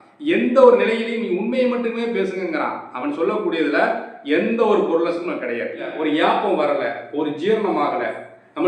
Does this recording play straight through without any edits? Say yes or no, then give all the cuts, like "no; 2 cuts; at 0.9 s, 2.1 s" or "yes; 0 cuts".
no; 1 cut; at 5.9 s